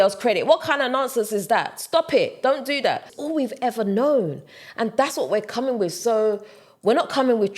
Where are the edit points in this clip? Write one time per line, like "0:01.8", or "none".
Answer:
0:03.1